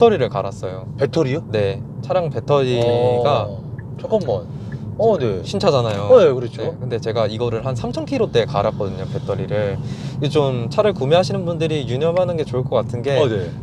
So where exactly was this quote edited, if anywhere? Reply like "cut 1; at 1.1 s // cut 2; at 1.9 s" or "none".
none